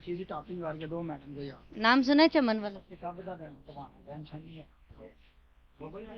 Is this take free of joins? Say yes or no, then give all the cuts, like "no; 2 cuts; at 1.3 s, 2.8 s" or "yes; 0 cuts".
no; 1 cut; at 2.9 s